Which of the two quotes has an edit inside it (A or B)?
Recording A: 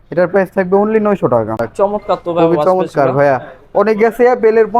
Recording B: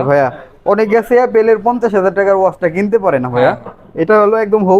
A